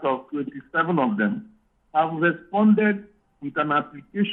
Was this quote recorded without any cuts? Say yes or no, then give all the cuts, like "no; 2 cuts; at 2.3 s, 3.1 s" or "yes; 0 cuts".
yes; 0 cuts